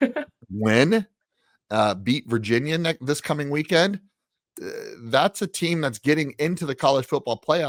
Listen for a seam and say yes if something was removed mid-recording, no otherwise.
no